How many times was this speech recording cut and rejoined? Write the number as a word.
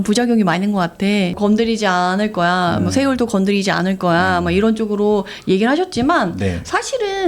one